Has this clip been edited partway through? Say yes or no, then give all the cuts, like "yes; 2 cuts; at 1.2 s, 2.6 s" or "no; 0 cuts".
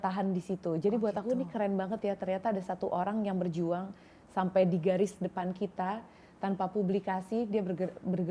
no; 0 cuts